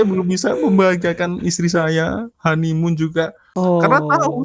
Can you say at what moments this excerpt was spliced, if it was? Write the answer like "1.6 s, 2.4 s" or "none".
3.4 s